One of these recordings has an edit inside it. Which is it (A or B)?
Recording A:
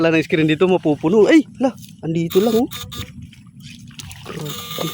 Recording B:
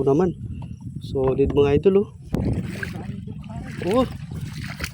B